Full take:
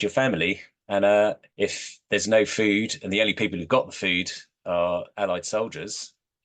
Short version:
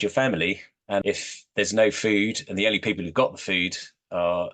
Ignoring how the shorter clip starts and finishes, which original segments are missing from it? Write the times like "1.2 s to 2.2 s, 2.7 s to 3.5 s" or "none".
1.0 s to 1.5 s